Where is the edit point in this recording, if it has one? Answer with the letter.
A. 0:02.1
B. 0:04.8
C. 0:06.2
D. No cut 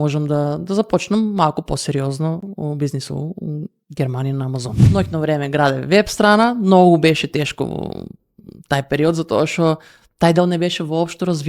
B